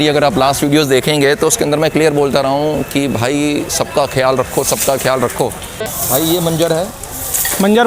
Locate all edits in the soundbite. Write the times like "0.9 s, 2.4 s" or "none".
5.7 s